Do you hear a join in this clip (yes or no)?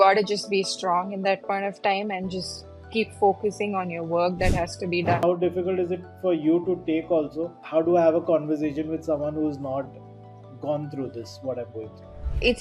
yes